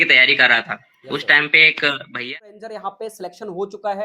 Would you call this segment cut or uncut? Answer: cut